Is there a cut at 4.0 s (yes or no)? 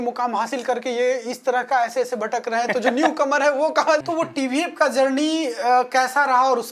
yes